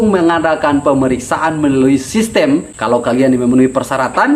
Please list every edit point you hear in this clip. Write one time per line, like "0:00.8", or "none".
0:02.7